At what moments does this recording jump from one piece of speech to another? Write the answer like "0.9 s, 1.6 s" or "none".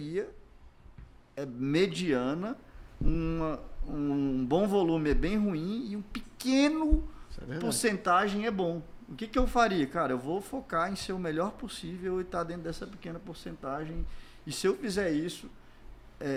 none